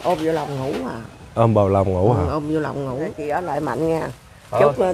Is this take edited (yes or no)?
yes